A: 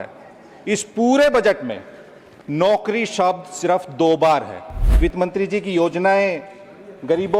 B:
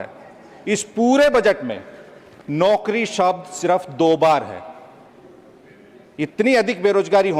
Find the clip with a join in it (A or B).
A